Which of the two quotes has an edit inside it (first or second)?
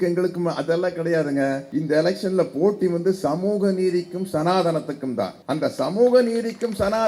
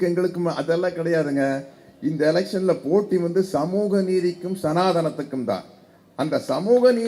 first